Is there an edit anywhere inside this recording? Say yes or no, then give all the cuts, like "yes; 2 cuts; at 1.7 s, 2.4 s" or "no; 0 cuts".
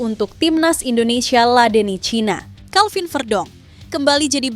yes; 1 cut; at 2.5 s